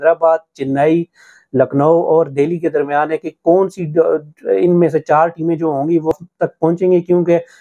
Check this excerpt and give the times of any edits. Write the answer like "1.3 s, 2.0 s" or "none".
6.1 s